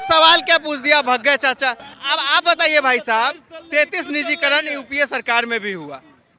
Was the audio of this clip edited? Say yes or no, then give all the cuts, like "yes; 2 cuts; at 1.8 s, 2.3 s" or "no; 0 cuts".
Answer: no; 0 cuts